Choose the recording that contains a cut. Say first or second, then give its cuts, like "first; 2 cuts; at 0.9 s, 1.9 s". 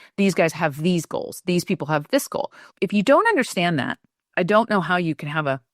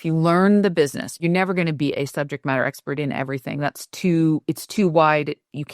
second; 1 cut; at 1.2 s